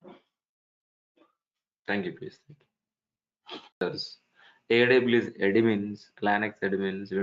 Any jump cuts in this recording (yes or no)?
yes